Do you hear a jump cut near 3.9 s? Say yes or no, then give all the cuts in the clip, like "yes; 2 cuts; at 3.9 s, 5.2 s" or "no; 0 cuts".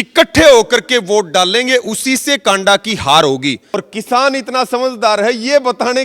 yes; 1 cut; at 3.9 s